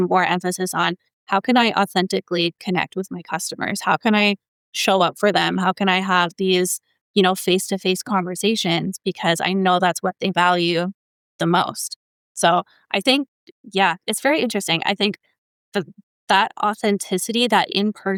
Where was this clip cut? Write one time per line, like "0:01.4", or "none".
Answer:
none